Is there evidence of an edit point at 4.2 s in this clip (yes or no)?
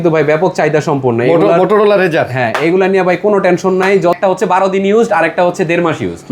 yes